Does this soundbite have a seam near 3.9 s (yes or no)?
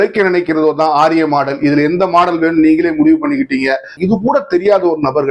yes